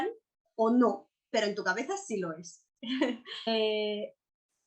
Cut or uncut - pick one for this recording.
cut